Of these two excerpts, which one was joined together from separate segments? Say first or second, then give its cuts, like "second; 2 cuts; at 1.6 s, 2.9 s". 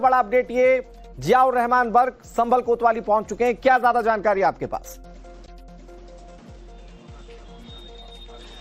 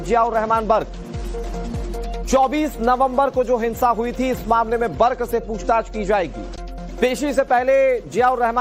second; 1 cut; at 5.2 s